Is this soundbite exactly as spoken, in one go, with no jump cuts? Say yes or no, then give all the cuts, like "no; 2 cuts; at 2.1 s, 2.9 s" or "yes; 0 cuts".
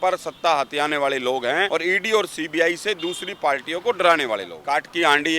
no; 2 cuts; at 1.7 s, 4.5 s